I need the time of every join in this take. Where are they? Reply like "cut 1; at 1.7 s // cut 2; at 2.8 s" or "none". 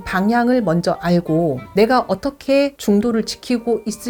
none